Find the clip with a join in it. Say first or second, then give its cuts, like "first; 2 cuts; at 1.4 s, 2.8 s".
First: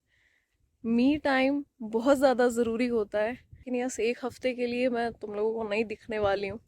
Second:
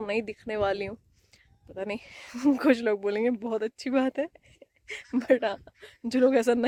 first; 1 cut; at 3.7 s